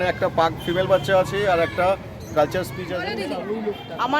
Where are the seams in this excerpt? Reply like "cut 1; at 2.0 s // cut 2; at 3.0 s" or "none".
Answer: cut 1; at 3.0 s

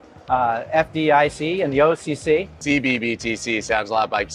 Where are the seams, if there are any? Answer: cut 1; at 2.5 s

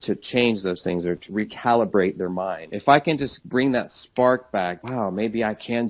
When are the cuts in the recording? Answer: cut 1; at 1.3 s // cut 2; at 2.7 s // cut 3; at 3.4 s // cut 4; at 4.8 s

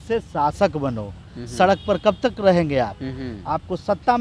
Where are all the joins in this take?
none

